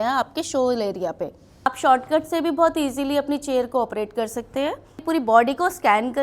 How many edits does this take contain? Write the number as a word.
two